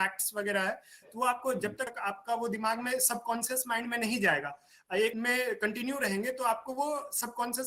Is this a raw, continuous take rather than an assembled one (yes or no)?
no